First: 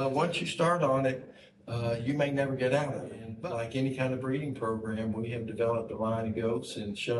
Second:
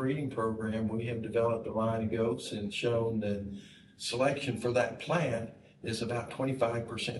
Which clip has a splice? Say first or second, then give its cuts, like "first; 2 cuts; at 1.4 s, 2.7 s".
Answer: first; 1 cut; at 3.2 s